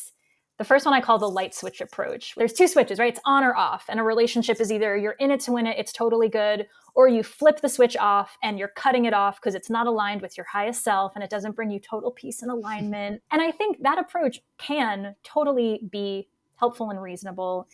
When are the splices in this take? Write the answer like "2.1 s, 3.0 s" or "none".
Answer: 2.3 s, 13.2 s